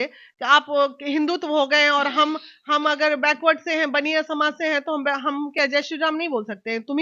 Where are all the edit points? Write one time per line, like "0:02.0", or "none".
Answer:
none